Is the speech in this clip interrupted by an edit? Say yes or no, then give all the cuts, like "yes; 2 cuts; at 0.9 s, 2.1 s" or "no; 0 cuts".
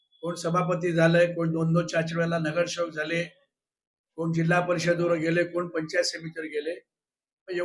no; 0 cuts